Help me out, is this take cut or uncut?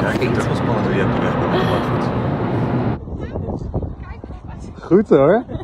cut